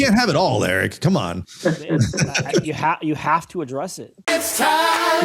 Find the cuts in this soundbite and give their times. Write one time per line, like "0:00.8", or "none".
0:04.2